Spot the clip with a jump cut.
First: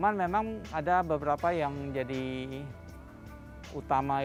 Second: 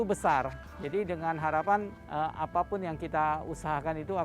second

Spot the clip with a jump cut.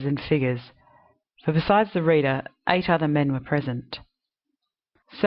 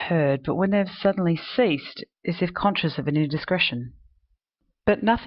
first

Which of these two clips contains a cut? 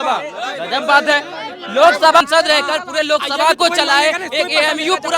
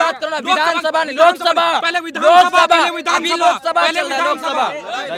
first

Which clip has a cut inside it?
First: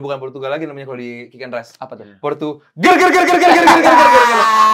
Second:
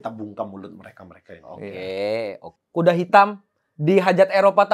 second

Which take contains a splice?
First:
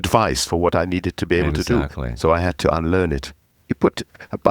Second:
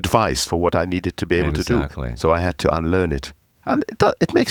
first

